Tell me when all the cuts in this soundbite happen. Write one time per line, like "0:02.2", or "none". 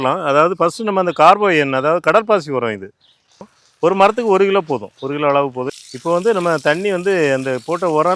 0:03.4
0:05.7